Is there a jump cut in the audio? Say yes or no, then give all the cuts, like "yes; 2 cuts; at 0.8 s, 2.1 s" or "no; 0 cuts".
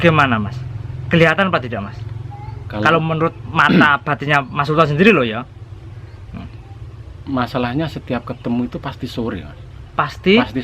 no; 0 cuts